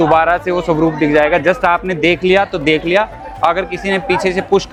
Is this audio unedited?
yes; 0 cuts

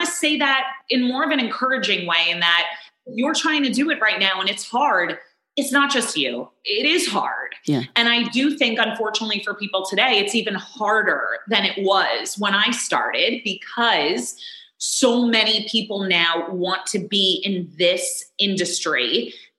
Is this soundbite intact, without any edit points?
yes; 0 cuts

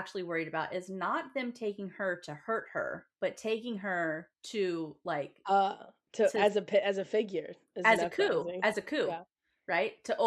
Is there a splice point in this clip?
yes; 2 cuts; at 3.1 s, 4.3 s

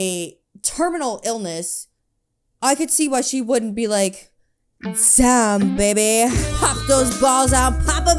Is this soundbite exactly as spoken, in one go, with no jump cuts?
yes; 0 cuts

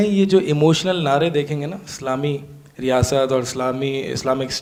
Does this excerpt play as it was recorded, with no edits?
yes; 0 cuts

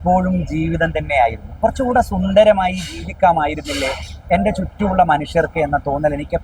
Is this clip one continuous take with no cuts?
yes; 0 cuts

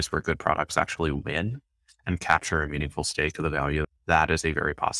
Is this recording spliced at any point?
yes; 1 cut; at 3.8 s

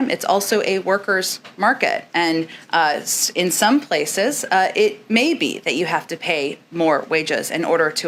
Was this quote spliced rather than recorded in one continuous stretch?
no; 0 cuts

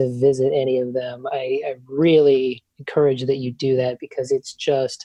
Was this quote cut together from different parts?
no; 0 cuts

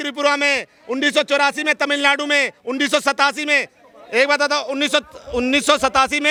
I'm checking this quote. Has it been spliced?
no; 0 cuts

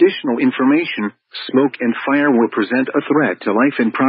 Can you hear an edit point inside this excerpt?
no; 0 cuts

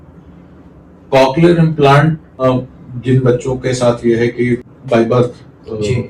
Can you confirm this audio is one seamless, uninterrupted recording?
no; 2 cuts; at 2.4 s, 4.7 s

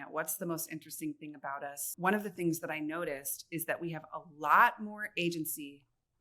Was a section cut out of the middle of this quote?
yes; 1 cut; at 1.9 s

